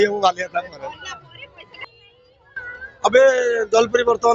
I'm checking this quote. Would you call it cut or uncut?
cut